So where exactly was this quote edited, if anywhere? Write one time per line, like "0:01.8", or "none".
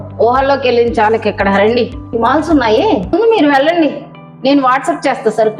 0:02.0
0:03.1